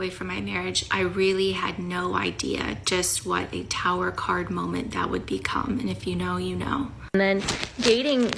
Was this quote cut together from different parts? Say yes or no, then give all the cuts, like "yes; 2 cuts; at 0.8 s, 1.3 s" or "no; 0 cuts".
yes; 1 cut; at 7.1 s